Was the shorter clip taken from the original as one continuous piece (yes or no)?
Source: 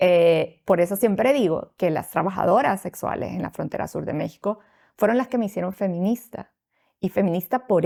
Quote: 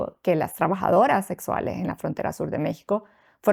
yes